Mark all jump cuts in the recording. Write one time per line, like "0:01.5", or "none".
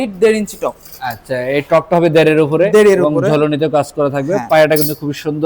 none